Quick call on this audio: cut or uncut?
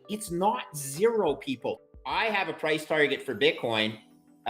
cut